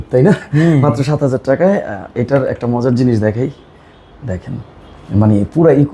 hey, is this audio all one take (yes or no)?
yes